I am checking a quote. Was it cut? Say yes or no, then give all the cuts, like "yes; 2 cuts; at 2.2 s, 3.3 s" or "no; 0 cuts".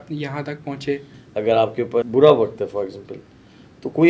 yes; 2 cuts; at 1.2 s, 2.0 s